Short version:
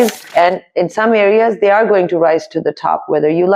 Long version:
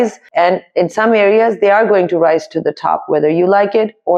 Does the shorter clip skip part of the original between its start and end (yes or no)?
no